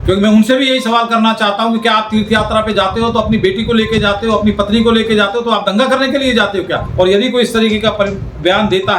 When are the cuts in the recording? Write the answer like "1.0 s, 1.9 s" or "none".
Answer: 6.8 s